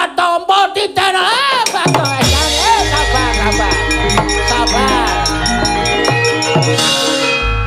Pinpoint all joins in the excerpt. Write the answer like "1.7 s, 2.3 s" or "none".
6.8 s